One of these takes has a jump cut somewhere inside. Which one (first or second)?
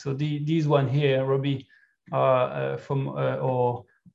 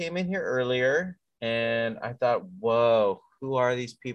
second